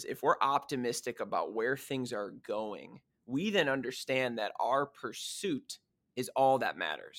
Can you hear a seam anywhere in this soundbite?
no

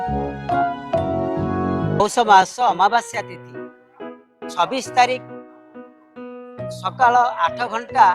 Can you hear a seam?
yes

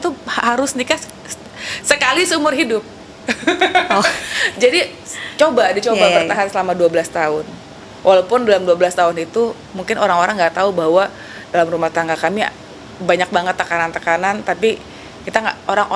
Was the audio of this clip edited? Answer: no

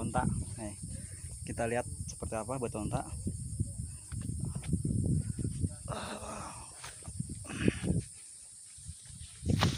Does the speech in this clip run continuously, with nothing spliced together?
yes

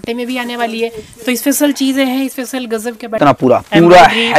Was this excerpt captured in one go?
no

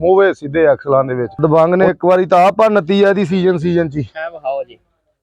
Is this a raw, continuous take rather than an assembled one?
no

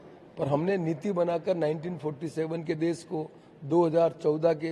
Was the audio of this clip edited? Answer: no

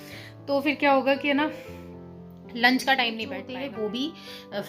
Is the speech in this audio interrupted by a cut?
yes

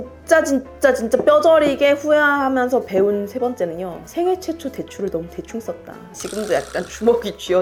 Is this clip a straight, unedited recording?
yes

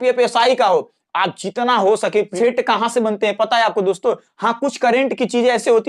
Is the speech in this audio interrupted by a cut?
yes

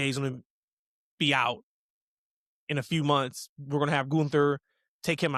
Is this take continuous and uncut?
yes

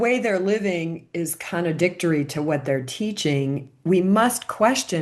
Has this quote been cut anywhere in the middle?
no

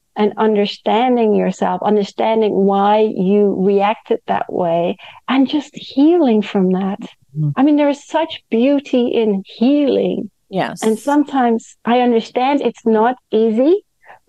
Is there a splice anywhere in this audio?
no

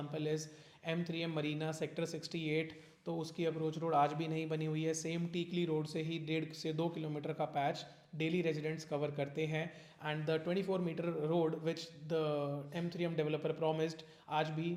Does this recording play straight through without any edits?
yes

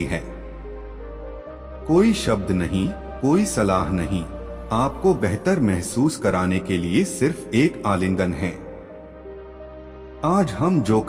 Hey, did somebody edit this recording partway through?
yes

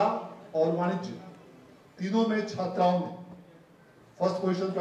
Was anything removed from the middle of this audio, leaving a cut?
no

